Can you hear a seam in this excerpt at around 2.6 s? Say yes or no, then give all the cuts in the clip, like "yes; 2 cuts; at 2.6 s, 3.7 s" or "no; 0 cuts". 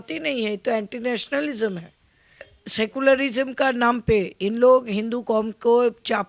yes; 1 cut; at 2.6 s